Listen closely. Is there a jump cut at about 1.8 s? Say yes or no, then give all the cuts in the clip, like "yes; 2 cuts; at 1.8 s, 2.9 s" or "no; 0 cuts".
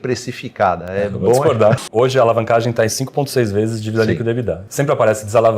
yes; 2 cuts; at 1.8 s, 4.6 s